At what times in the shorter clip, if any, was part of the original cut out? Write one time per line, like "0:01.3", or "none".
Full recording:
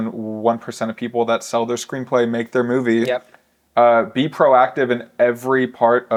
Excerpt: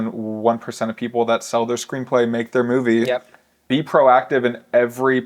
0:03.6